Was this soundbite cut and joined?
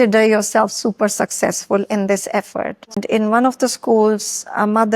yes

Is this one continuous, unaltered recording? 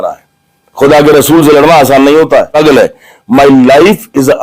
no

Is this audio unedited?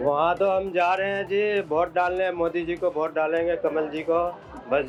yes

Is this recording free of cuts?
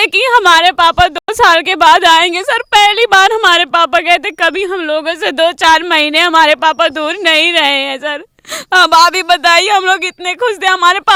yes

